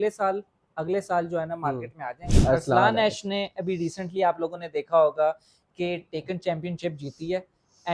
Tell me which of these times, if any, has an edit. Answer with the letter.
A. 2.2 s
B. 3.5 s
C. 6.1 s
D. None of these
A